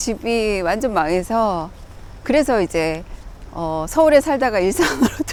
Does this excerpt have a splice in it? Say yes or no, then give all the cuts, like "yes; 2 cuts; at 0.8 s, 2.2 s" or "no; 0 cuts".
no; 0 cuts